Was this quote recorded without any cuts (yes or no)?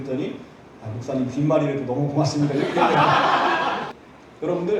no